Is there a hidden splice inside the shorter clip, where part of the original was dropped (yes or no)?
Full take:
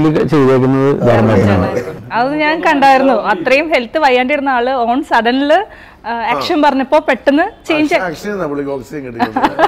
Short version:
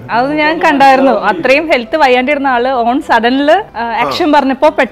yes